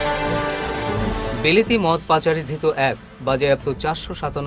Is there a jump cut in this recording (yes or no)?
yes